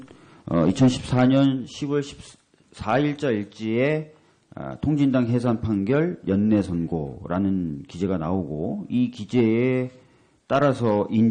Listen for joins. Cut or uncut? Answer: uncut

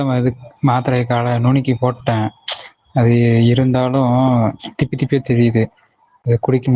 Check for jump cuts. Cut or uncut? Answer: uncut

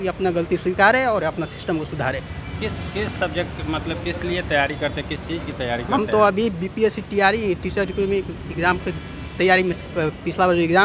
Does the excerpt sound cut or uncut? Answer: uncut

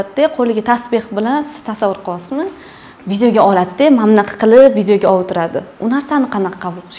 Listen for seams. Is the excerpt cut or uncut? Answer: uncut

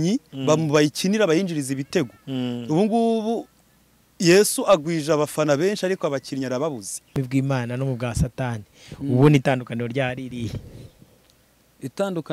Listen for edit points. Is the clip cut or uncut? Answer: cut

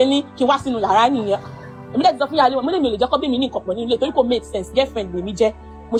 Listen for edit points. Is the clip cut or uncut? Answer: uncut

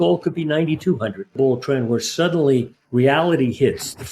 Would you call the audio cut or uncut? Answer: cut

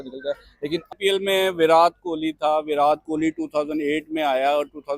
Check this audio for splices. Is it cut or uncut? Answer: cut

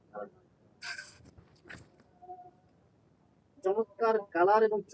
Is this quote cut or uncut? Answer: uncut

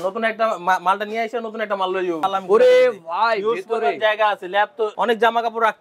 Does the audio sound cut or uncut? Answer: cut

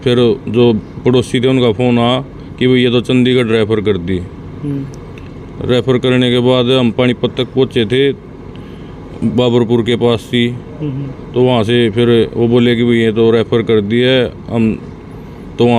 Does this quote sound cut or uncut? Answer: uncut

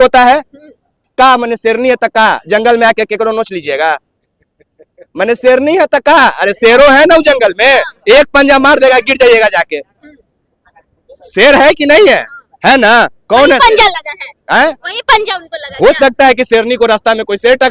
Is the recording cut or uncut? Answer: uncut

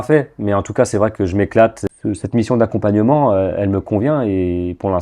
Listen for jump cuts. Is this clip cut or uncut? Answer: cut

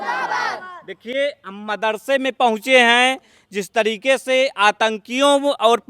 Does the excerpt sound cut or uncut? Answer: uncut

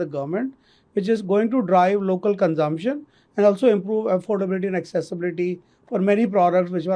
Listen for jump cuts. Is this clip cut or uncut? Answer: uncut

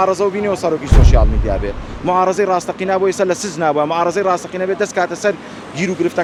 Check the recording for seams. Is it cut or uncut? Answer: uncut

